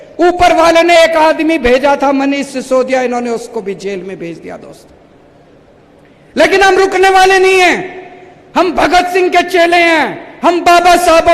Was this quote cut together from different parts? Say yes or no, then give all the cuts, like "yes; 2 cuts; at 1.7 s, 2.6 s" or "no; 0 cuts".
no; 0 cuts